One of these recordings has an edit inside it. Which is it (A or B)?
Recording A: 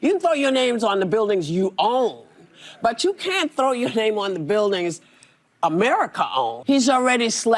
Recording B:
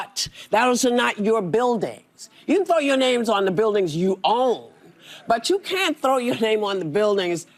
A